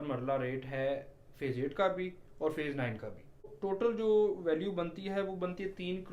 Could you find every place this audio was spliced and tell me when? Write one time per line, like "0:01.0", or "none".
0:03.5